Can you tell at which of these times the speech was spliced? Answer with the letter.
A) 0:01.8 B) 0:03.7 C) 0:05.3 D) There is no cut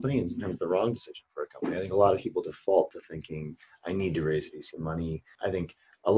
C